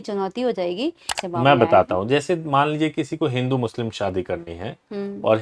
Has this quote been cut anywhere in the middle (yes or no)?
yes